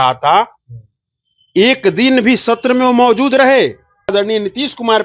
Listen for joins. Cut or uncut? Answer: cut